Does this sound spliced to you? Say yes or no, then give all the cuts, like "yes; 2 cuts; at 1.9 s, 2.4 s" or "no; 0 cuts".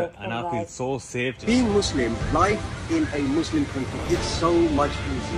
yes; 1 cut; at 1.4 s